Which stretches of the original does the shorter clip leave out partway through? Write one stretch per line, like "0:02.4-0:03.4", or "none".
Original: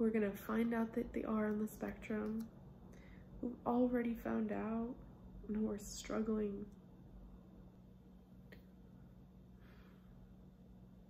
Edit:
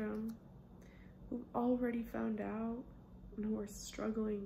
none

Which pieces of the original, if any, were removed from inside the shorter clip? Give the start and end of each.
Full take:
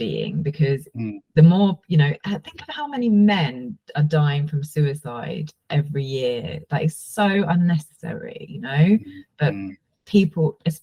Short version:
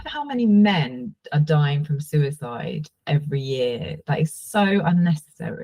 none

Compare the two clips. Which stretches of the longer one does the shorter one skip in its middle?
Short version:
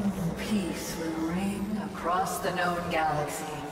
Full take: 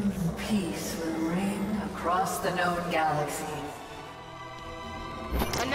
none

